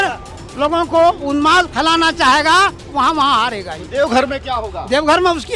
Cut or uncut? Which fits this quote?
uncut